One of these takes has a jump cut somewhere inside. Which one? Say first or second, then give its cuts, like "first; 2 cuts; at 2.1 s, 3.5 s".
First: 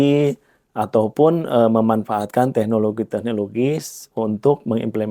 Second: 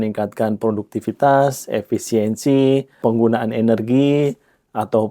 second; 1 cut; at 3.0 s